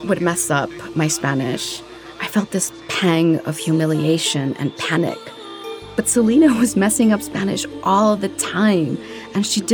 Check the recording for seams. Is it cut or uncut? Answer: uncut